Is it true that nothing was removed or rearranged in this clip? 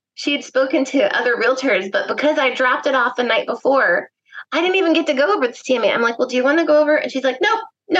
yes; 0 cuts

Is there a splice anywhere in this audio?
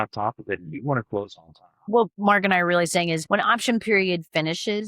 yes; 2 cuts; at 1.8 s, 3.2 s

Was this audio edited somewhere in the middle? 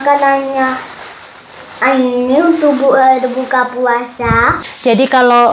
yes; 1 cut; at 4.6 s

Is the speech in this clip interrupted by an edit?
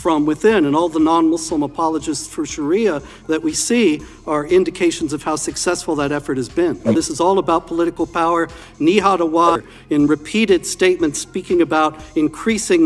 yes; 2 cuts; at 6.9 s, 9.6 s

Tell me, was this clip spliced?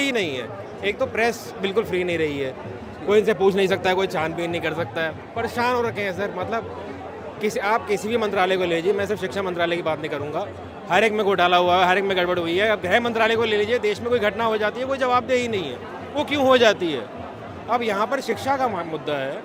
no; 0 cuts

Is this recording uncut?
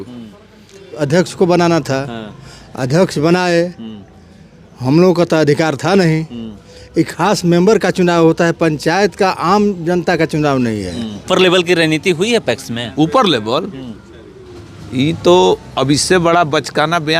no; 2 cuts; at 1.0 s, 11.2 s

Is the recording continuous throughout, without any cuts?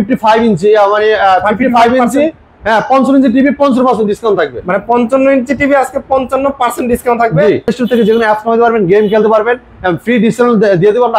no; 1 cut; at 7.7 s

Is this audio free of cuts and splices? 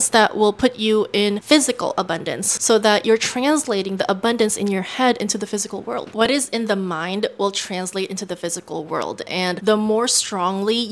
yes; 0 cuts

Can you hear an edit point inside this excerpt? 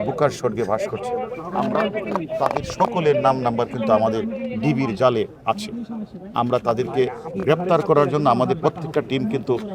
yes; 1 cut; at 1.3 s

